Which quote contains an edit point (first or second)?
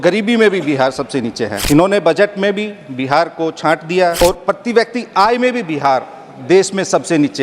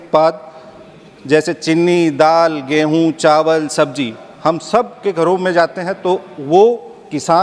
first